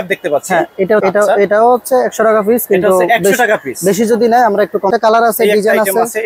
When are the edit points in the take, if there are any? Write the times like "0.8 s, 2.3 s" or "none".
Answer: 1.0 s, 4.9 s